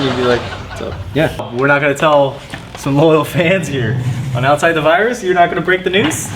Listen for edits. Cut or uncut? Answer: cut